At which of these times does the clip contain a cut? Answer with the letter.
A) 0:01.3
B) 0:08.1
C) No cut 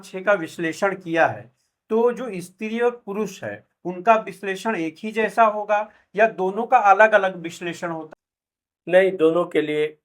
B